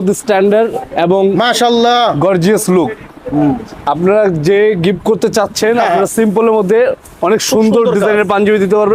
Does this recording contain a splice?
no; 0 cuts

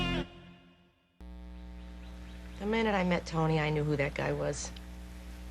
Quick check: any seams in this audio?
yes; 1 cut; at 1.0 s

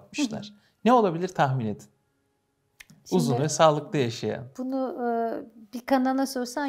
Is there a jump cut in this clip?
no; 0 cuts

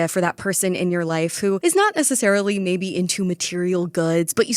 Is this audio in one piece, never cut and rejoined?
yes; 0 cuts

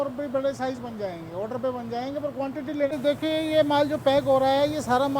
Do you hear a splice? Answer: yes; 1 cut; at 2.9 s

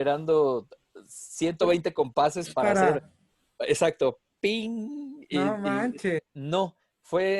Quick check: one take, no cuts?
no; 1 cut; at 6.3 s

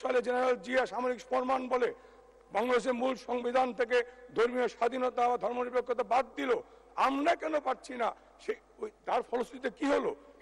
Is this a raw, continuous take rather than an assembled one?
yes; 0 cuts

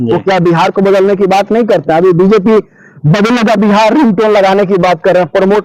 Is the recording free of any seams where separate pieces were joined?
yes; 0 cuts

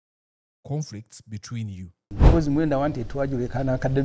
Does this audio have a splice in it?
yes; 1 cut; at 2.1 s

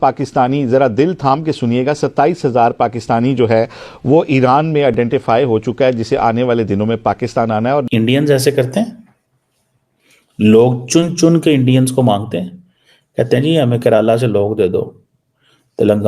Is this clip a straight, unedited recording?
no; 1 cut; at 7.9 s

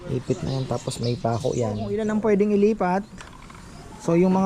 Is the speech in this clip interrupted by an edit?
yes; 1 cut; at 1.9 s

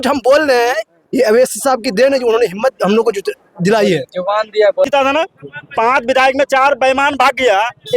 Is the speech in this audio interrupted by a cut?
yes; 1 cut; at 4.9 s

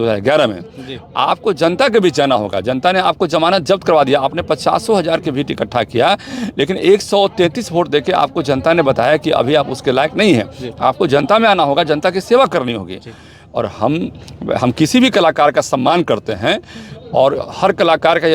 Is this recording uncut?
yes; 0 cuts

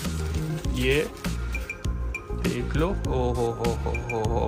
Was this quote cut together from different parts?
no; 0 cuts

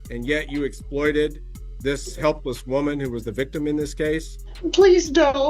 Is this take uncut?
no; 1 cut; at 4.4 s

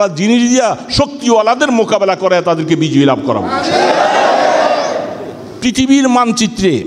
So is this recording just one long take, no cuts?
no; 1 cut; at 5.5 s

